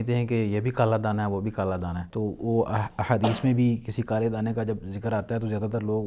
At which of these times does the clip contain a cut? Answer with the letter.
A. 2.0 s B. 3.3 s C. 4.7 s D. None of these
A